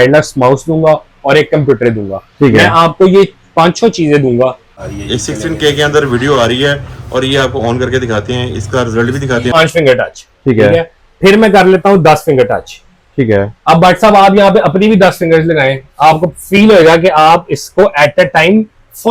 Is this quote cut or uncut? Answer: cut